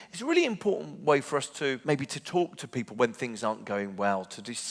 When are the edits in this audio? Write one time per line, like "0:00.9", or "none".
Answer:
0:01.8